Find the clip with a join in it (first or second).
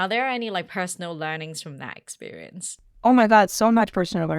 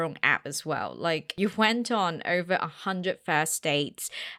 first